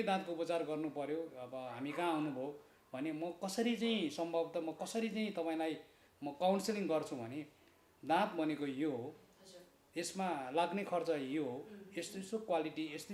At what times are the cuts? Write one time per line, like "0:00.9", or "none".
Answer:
none